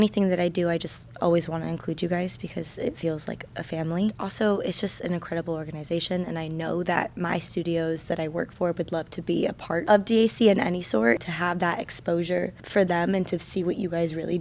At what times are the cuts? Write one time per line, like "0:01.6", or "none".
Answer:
0:04.2
0:09.8
0:11.2
0:12.6